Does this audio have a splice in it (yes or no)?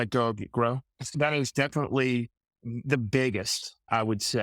yes